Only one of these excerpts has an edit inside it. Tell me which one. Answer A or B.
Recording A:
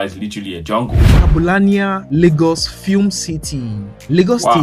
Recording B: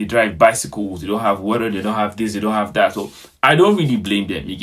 A